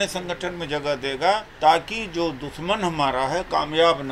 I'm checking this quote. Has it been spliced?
yes; 1 cut; at 1.5 s

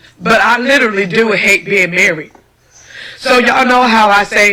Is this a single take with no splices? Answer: yes; 0 cuts

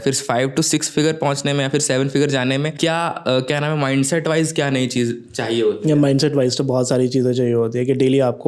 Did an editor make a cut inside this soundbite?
yes; 1 cut; at 2.7 s

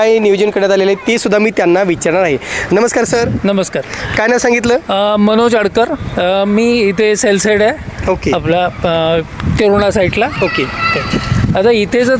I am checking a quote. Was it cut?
no; 0 cuts

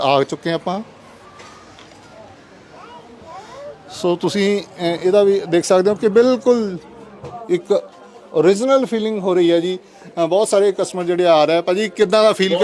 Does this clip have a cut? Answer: no; 0 cuts

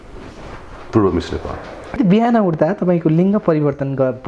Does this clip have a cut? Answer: yes; 1 cut; at 2.0 s

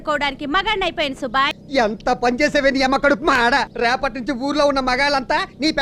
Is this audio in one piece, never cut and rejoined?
no; 2 cuts; at 1.5 s, 3.7 s

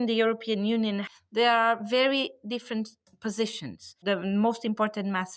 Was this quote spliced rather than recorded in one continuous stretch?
yes; 2 cuts; at 1.0 s, 3.9 s

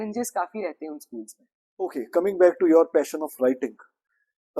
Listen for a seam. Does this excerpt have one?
yes; 1 cut; at 1.9 s

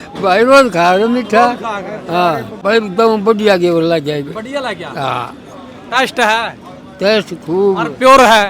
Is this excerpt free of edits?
no; 1 cut; at 2.5 s

